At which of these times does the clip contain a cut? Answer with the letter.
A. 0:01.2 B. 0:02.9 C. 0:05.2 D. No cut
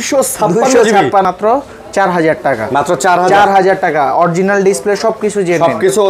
A